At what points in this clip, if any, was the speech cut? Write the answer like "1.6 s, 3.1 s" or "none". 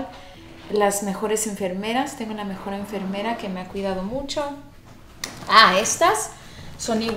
none